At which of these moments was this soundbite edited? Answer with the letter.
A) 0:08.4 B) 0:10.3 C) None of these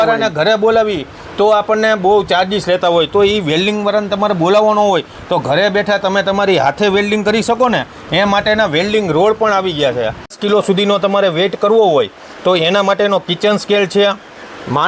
B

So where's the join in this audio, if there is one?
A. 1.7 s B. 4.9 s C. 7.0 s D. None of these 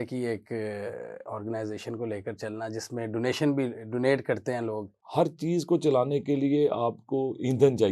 B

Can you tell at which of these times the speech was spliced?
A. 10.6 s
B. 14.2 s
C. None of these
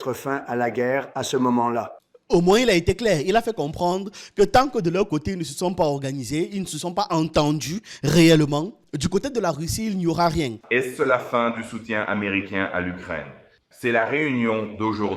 A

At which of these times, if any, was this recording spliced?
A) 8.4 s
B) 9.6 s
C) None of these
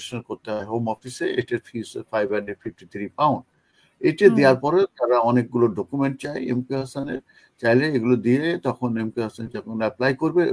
C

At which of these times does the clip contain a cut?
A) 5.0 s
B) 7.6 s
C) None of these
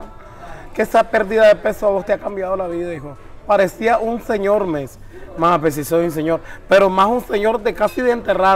C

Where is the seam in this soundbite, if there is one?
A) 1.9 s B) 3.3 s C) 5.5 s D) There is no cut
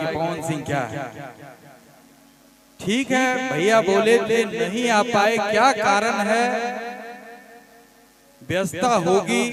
D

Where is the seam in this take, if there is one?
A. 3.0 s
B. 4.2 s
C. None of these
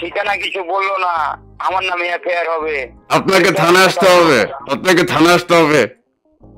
C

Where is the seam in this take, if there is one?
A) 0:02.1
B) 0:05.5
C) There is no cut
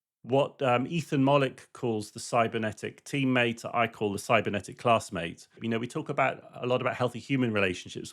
B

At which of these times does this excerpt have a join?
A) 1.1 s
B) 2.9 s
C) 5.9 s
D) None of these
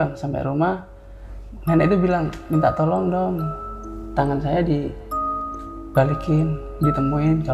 D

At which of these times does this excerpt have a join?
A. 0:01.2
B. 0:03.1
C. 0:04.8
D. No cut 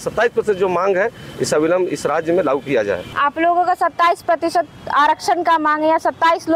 B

